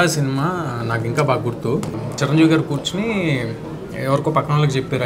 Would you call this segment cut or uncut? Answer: cut